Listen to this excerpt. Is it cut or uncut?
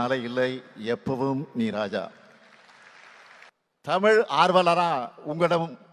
cut